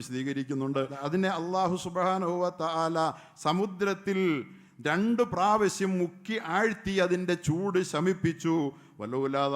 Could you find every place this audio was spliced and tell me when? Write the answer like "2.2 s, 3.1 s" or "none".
1.0 s